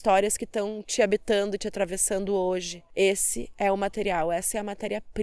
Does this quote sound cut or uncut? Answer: cut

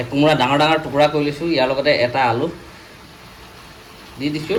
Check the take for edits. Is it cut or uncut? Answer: uncut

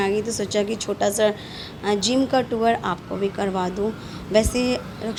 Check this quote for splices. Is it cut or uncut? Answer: uncut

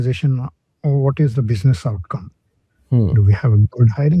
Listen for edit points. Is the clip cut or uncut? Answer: uncut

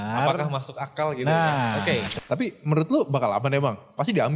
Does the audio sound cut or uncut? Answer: cut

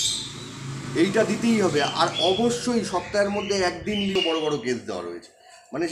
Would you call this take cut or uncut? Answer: cut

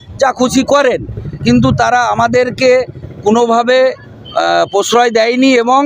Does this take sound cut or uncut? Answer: uncut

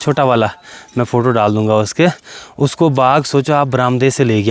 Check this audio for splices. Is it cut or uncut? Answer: uncut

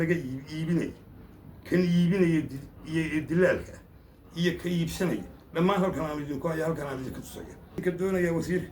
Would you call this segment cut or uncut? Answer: cut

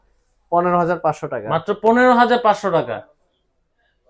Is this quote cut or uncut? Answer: uncut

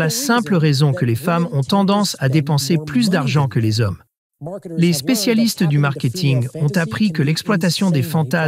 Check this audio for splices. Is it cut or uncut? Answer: cut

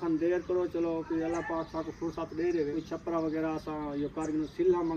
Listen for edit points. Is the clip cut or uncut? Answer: cut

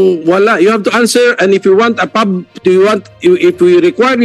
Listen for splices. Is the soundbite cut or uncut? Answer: uncut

